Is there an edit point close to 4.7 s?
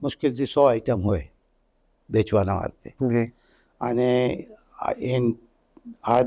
no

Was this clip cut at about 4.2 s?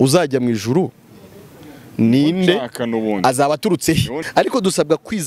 yes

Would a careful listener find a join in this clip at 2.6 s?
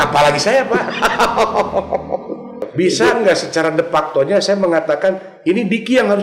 yes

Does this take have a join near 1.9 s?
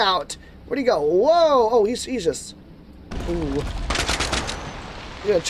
no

